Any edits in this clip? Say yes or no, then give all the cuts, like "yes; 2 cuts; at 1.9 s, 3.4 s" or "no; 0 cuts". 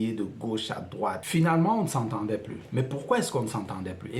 yes; 1 cut; at 1.2 s